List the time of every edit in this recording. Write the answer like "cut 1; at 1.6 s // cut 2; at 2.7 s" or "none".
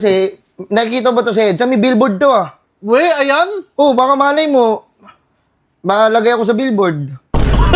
none